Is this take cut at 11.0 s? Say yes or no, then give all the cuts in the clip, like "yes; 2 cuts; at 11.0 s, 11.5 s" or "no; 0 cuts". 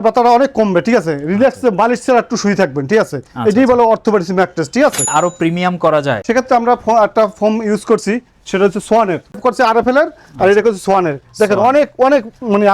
no; 3 cuts; at 5.1 s, 6.2 s, 9.4 s